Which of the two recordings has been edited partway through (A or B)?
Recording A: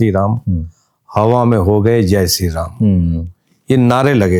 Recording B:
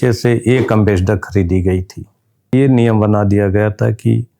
B